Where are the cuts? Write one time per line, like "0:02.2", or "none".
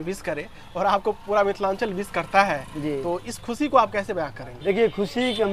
none